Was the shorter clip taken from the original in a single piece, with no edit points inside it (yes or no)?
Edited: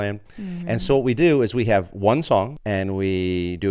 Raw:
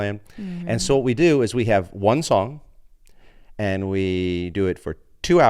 no